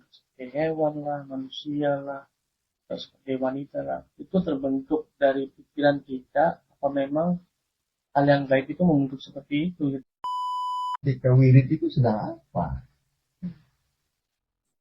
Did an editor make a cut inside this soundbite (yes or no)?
yes